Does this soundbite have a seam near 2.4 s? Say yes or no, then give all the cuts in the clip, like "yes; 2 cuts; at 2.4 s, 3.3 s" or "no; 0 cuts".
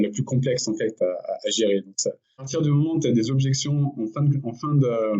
yes; 1 cut; at 2.4 s